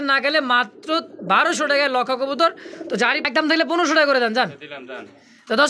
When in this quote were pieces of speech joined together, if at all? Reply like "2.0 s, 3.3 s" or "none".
3.2 s